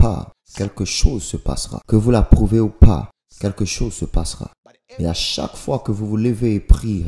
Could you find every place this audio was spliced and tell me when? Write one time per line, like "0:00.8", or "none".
0:01.8